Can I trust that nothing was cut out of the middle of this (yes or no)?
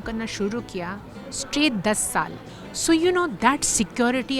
no